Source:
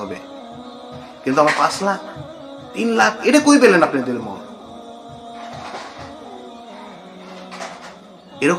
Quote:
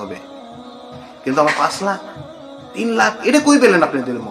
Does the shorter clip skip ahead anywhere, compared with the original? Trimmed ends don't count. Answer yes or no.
no